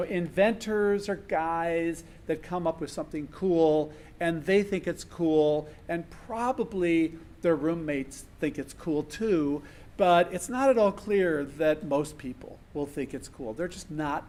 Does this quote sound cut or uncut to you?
uncut